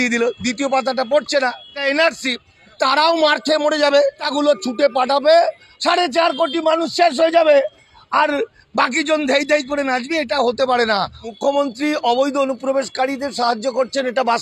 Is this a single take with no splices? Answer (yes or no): no